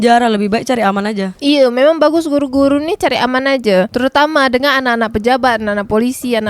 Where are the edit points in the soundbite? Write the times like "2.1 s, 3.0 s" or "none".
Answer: none

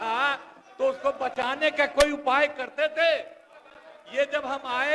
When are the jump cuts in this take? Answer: none

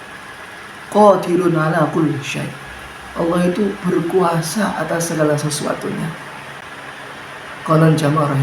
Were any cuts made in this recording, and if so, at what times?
6.6 s

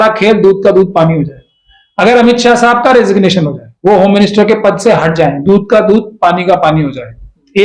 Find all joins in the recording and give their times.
none

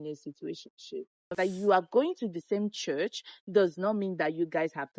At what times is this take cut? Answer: 1.3 s

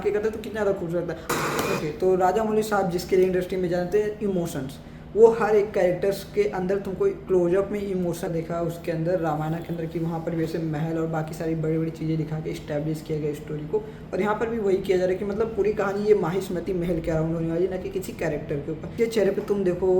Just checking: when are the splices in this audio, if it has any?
1.2 s, 8.3 s, 18.9 s

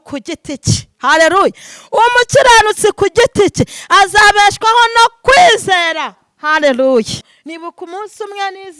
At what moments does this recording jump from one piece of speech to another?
7.3 s

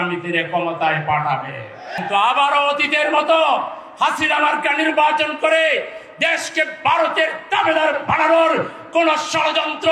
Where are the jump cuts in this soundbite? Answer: 1.9 s

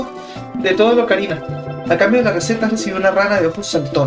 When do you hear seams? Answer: none

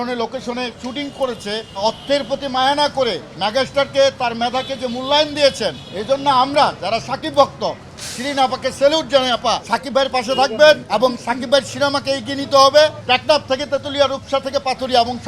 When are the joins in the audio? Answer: 1.7 s, 5.9 s, 9.7 s, 10.8 s, 13.0 s

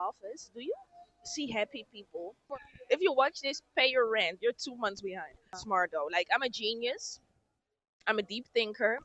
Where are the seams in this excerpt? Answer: 2.6 s, 5.6 s

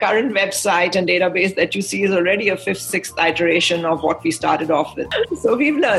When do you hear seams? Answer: 5.0 s

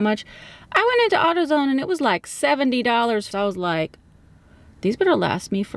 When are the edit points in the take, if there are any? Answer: 3.3 s

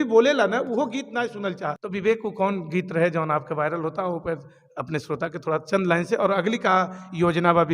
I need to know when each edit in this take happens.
1.8 s

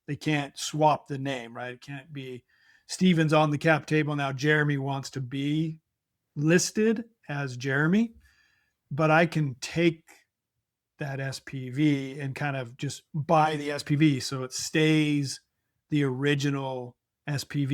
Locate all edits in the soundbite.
none

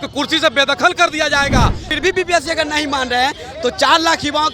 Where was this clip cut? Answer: 1.8 s

